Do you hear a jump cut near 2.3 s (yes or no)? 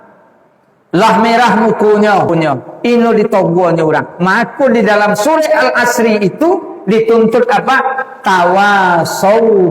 yes